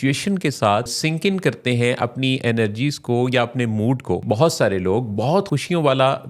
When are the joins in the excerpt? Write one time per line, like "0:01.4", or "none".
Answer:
0:00.9
0:04.2
0:05.5